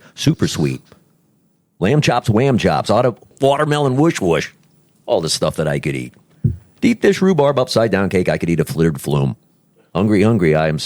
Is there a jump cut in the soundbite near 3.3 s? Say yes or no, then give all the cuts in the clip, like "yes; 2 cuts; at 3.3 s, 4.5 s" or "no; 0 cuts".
yes; 1 cut; at 3.3 s